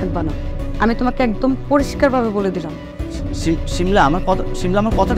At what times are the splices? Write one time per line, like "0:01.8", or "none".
none